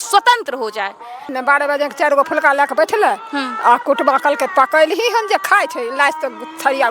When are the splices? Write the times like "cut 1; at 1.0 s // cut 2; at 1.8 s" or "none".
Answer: cut 1; at 1.3 s